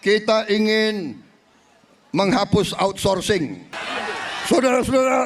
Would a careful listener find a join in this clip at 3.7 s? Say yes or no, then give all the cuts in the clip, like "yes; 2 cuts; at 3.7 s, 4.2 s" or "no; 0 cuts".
yes; 1 cut; at 3.7 s